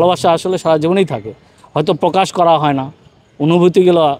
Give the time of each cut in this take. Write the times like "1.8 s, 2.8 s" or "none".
none